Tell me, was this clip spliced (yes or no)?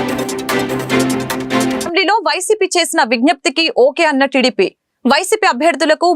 yes